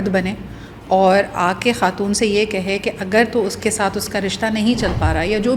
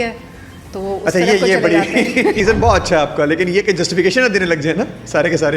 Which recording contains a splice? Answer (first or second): second